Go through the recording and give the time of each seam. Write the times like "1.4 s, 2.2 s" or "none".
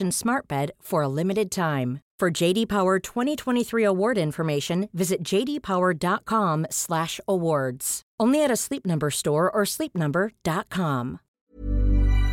11.3 s